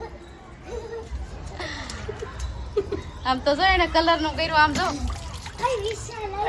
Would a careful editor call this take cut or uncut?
uncut